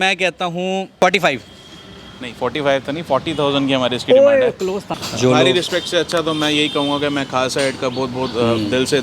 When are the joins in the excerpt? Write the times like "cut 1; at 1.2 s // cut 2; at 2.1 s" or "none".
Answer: cut 1; at 0.9 s // cut 2; at 4.9 s

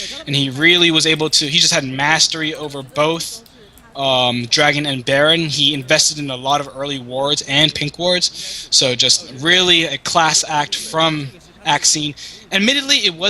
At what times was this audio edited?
cut 1; at 11.3 s

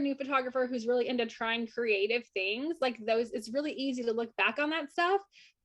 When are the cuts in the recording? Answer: none

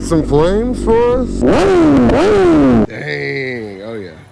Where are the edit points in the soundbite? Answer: cut 1; at 1.4 s // cut 2; at 2.9 s

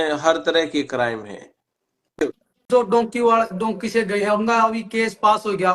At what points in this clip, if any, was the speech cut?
cut 1; at 2.2 s

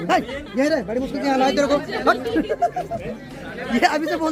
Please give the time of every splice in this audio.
none

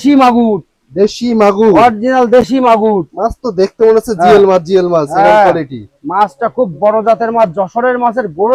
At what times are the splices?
none

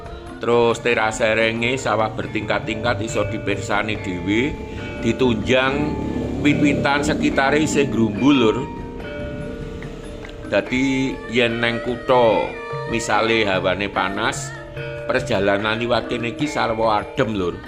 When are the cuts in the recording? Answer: none

